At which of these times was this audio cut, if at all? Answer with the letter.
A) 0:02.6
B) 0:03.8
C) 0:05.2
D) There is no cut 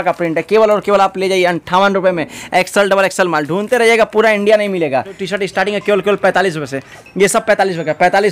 C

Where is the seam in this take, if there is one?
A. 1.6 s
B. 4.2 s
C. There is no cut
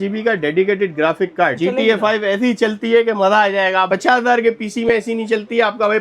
A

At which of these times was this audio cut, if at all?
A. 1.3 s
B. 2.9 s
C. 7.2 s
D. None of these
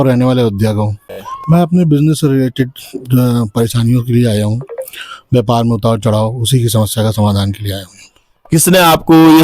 A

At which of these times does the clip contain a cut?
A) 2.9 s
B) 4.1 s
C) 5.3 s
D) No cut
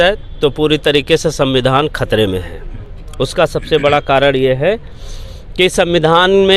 D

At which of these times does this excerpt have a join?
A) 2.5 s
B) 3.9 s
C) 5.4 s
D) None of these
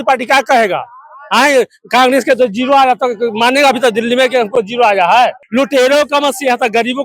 C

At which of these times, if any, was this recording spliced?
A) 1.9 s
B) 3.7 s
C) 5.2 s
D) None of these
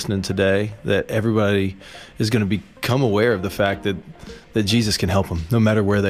D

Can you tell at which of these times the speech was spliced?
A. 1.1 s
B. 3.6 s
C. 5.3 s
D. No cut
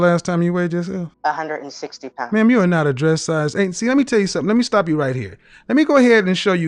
A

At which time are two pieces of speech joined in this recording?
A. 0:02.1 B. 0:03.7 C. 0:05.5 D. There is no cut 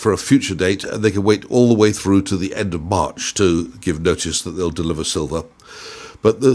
D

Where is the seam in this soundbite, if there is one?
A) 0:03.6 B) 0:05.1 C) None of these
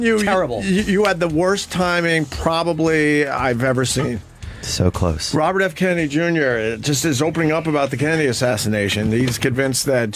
A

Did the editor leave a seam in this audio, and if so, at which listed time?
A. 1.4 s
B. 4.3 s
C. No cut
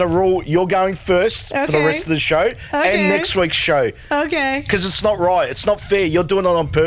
C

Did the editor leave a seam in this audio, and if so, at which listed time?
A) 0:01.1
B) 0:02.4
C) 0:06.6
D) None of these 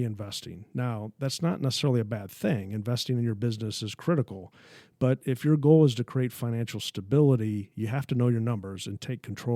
D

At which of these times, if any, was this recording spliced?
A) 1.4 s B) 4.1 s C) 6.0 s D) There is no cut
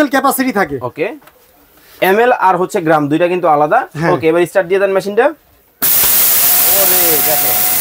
D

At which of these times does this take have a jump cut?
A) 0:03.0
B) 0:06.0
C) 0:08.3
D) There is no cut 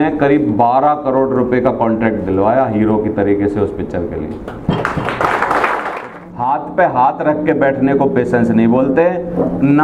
B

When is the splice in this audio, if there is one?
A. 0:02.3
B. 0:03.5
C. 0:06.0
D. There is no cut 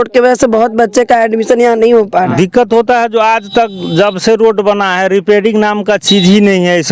A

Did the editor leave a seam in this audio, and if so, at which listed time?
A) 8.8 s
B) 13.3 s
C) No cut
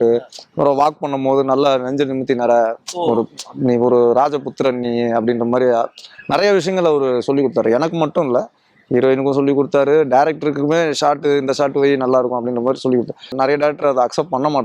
B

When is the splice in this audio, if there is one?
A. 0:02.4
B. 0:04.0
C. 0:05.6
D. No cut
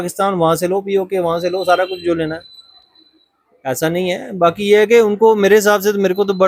D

